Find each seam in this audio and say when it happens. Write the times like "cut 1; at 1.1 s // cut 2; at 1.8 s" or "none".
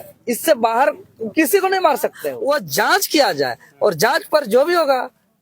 cut 1; at 2.3 s